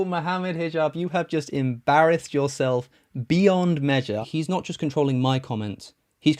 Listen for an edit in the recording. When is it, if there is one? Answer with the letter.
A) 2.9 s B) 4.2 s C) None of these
B